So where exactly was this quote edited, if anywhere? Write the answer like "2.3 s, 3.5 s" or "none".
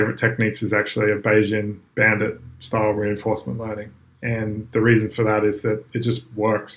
none